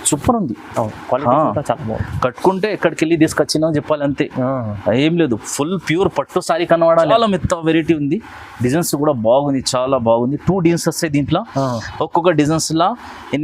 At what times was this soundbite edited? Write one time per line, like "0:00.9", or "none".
0:07.1